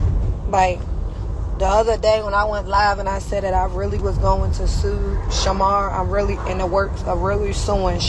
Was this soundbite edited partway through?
no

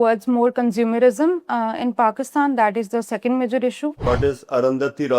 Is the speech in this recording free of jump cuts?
no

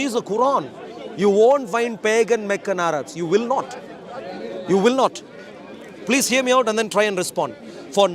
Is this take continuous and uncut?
yes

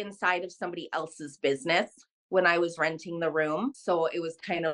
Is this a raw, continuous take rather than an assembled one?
no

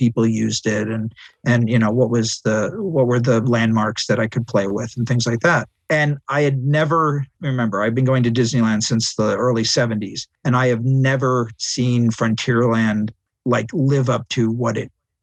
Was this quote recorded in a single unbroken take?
yes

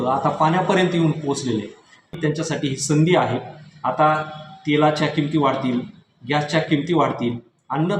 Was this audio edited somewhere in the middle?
yes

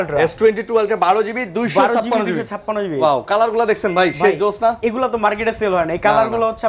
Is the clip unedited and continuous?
yes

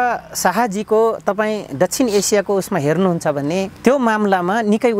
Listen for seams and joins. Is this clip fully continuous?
no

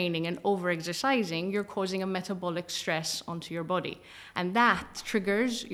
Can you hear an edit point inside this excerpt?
no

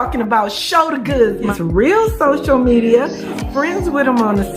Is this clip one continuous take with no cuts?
no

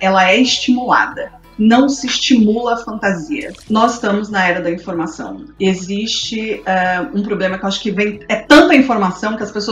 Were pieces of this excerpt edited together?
yes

